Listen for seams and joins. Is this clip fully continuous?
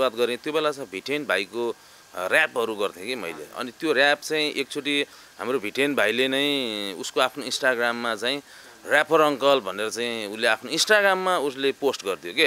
yes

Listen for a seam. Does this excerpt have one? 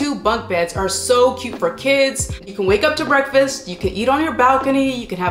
yes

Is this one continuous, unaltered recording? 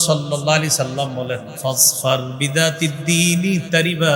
yes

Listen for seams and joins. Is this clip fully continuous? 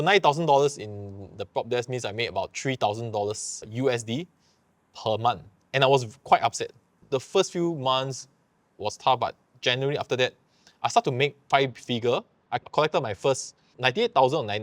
no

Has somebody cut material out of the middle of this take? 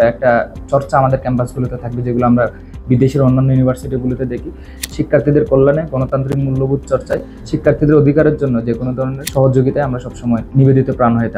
yes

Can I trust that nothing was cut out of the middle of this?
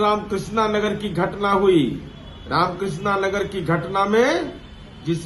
yes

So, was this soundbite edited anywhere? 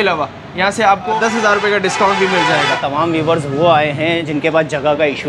yes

